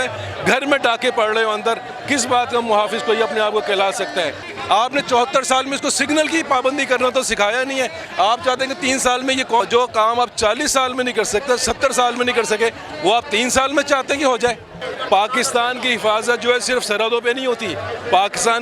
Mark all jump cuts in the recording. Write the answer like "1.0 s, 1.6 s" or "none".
4.5 s, 9.6 s, 14.9 s